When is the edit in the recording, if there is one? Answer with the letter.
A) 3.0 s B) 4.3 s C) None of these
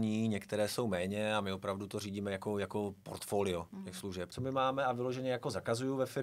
B